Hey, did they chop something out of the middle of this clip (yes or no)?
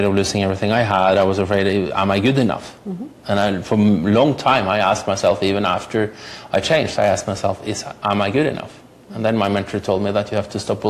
no